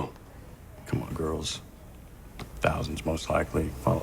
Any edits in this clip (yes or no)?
yes